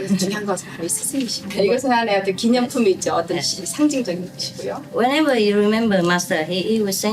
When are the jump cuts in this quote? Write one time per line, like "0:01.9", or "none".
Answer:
0:01.4

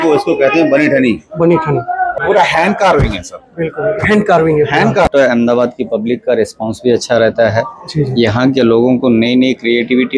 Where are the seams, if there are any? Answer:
0:02.2
0:05.1

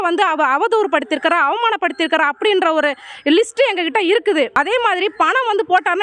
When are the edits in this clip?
0:04.5

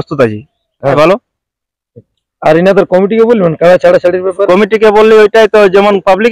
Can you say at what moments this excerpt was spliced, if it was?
0:01.0

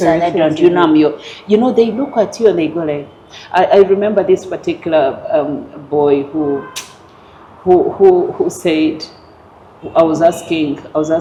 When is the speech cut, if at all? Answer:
none

